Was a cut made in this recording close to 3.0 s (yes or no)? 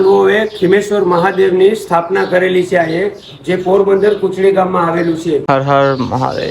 no